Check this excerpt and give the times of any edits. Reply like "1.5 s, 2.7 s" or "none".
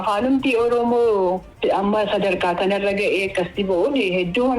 1.5 s